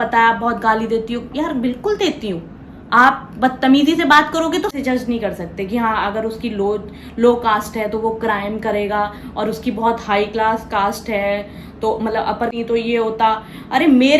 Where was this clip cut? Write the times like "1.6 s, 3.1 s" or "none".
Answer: 4.7 s, 12.5 s